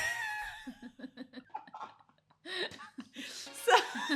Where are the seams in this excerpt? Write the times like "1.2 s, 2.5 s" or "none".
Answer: 1.5 s